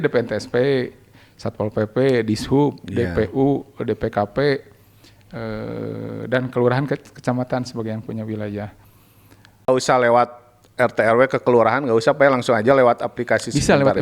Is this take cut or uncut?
cut